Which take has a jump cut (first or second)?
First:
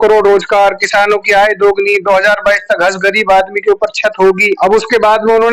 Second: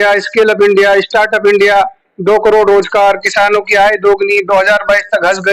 first